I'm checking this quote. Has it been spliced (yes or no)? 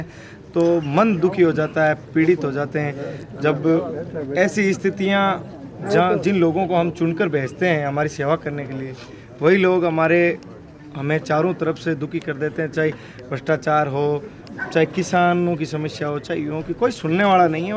no